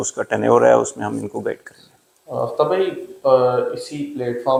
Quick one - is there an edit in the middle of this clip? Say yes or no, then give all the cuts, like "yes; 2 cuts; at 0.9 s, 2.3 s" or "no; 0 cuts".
no; 0 cuts